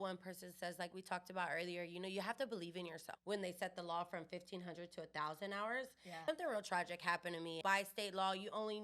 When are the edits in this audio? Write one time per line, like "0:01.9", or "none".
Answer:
0:03.1
0:06.0
0:07.6